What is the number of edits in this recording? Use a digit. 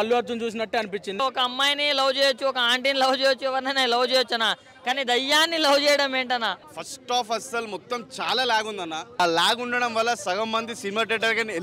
3